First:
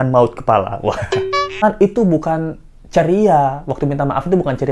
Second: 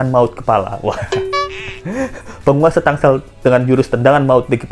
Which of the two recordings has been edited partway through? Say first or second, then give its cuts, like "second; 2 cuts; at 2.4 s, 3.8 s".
first; 1 cut; at 1.6 s